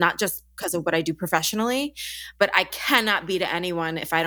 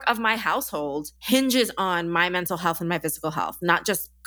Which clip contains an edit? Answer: first; 1 cut; at 2.7 s

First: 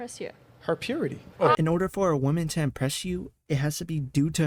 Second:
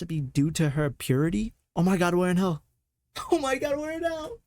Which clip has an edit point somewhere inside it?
second; 1 cut; at 1.6 s

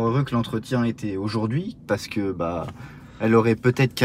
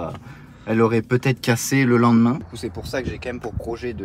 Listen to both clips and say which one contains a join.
second; 1 cut; at 2.6 s

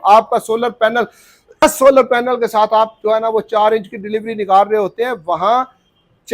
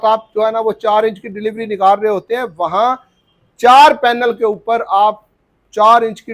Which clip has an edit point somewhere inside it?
first; 1 cut; at 1.6 s

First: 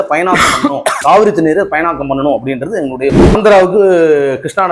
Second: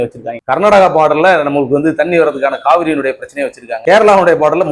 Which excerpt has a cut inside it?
first; 1 cut; at 3.3 s

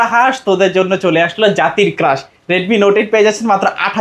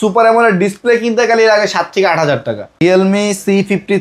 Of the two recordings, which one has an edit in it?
second; 1 cut; at 2.8 s

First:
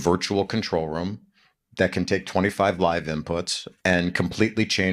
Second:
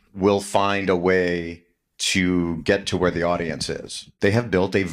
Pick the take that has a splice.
second; 1 cut; at 4.0 s

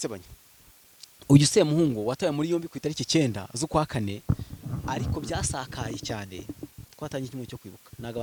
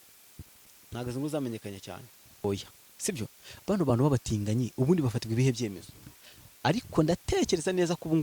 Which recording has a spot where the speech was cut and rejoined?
second; 1 cut; at 2.4 s

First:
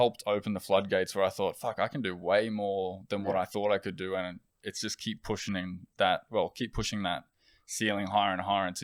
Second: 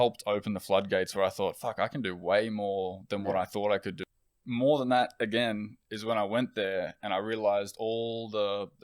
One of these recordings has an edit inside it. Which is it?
second; 1 cut; at 4.0 s

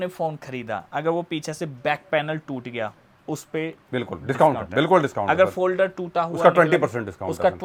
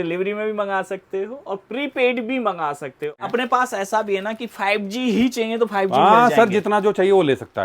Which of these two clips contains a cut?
second; 1 cut; at 3.3 s

